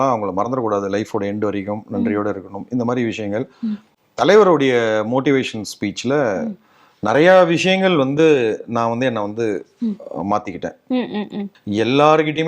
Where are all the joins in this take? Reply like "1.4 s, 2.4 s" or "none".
11.5 s